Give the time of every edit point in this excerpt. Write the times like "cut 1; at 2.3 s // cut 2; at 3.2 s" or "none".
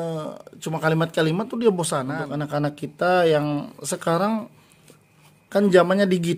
cut 1; at 2.1 s